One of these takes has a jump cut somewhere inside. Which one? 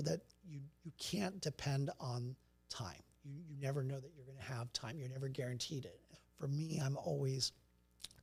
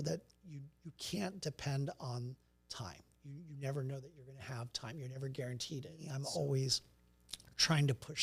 second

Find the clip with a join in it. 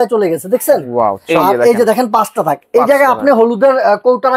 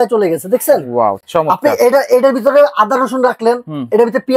first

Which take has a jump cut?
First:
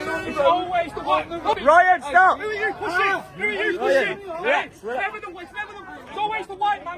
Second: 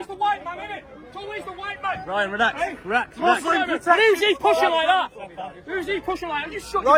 first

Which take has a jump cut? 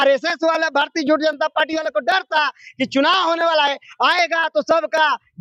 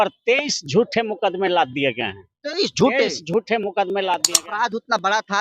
second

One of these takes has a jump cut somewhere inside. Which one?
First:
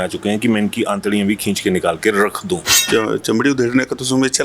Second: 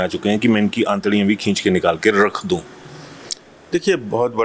first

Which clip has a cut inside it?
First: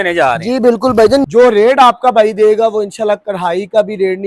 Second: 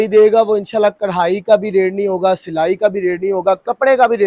first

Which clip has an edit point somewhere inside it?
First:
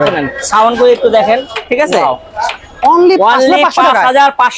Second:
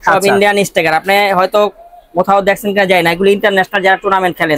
first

